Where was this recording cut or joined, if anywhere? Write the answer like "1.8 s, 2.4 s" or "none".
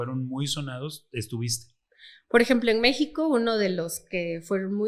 none